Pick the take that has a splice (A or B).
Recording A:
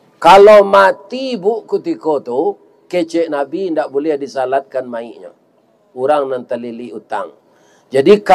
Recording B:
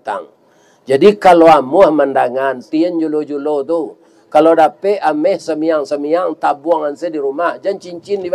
B